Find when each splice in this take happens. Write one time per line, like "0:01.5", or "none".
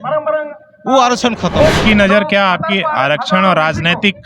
0:01.8